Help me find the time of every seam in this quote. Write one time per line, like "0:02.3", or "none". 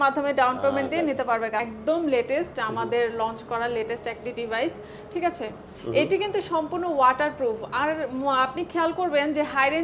0:01.7